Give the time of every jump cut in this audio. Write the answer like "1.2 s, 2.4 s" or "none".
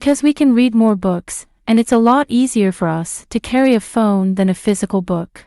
3.1 s